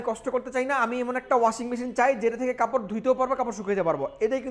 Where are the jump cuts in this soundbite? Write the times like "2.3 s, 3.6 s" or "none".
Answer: none